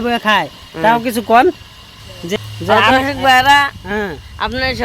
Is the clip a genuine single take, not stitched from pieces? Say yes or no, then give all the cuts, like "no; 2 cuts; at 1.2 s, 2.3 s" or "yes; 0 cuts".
no; 1 cut; at 2.2 s